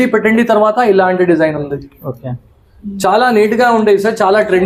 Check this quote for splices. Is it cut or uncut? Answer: uncut